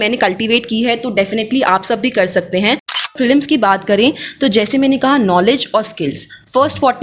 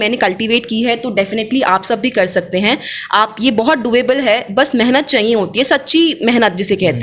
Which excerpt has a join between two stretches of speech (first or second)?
first